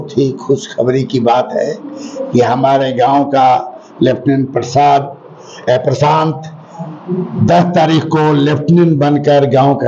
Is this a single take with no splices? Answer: yes; 0 cuts

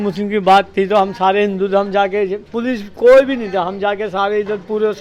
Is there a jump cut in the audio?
no; 0 cuts

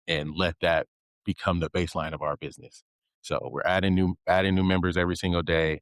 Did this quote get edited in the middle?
no; 0 cuts

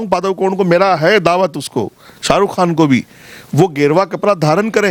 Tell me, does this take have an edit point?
no; 0 cuts

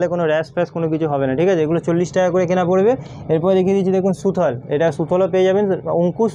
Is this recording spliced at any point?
no; 0 cuts

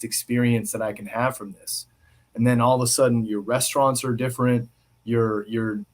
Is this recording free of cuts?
yes; 0 cuts

